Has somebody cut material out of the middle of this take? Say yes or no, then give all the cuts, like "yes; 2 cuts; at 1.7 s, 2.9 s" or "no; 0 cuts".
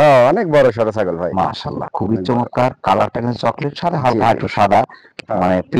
no; 0 cuts